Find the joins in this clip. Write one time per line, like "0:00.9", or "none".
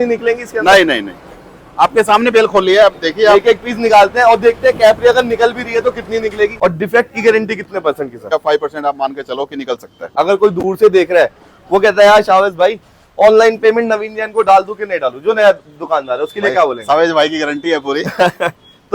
0:06.5
0:08.3
0:10.0